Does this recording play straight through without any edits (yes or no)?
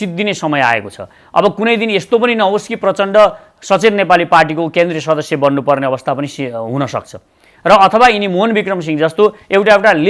yes